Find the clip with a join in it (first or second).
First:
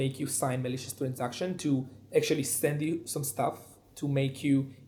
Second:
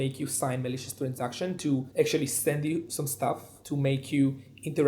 second